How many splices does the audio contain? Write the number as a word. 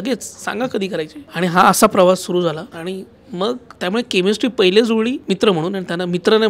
three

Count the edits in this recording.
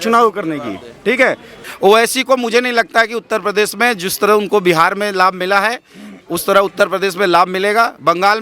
one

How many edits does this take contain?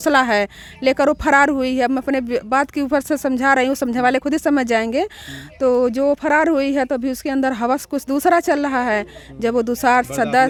zero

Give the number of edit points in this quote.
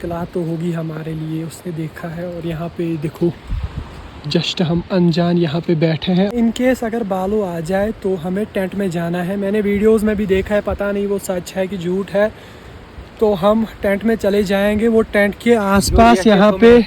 one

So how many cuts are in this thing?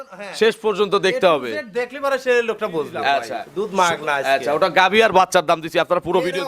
one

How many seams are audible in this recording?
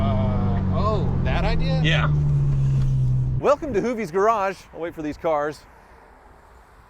one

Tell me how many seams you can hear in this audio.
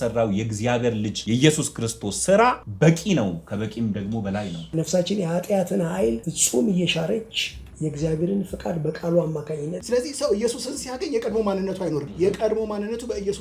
six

